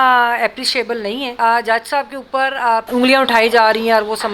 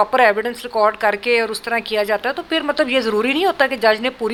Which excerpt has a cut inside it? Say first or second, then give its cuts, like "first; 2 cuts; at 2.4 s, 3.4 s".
first; 2 cuts; at 1.3 s, 2.9 s